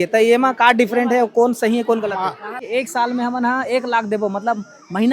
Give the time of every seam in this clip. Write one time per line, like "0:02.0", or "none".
0:02.5

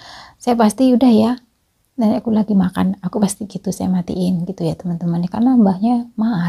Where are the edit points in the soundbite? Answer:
none

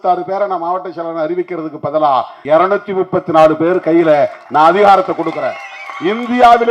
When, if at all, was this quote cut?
0:02.4

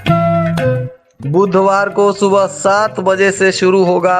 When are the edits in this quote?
0:00.9

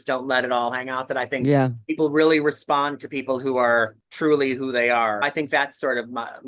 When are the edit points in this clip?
0:04.0
0:05.2

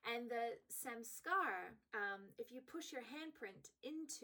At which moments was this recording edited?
0:01.8

